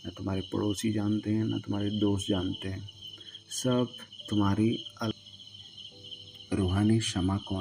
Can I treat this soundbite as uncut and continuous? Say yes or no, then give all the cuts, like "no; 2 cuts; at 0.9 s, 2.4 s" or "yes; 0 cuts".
no; 1 cut; at 5.1 s